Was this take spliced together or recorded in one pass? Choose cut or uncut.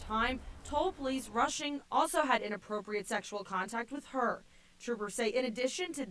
uncut